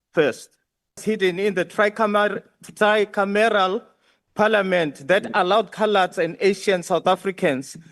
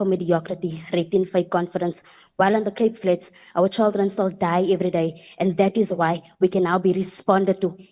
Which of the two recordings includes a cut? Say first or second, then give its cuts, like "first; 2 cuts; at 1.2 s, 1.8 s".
first; 1 cut; at 1.0 s